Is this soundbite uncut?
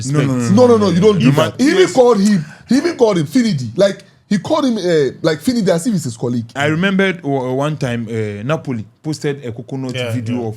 no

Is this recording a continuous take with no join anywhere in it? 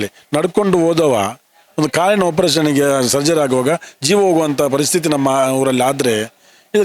yes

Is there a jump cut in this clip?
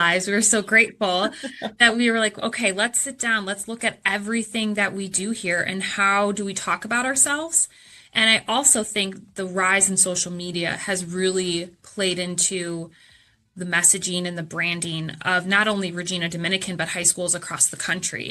no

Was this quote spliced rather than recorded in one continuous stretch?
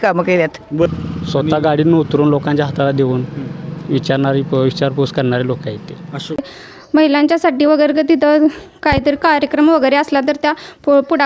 yes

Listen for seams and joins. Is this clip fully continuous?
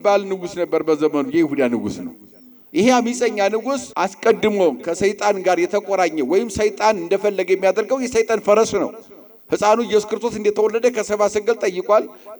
no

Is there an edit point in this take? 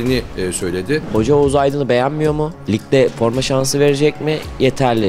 yes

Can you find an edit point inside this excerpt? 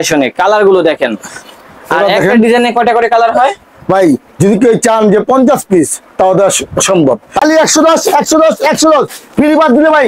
yes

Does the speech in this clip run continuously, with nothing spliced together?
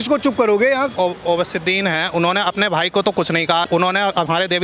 no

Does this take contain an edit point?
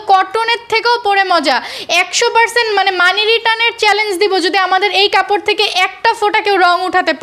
no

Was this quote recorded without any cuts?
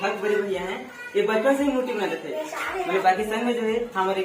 no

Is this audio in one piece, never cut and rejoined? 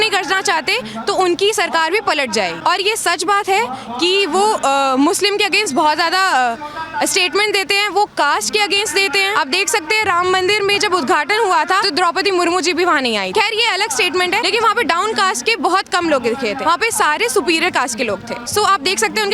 yes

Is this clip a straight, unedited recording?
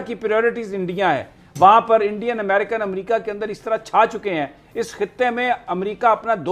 yes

